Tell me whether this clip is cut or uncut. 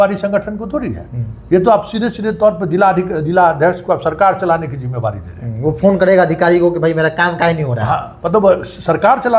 uncut